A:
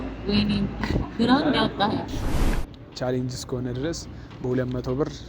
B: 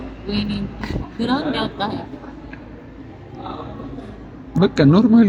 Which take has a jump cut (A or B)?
A